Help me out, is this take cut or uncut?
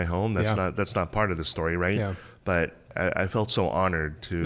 cut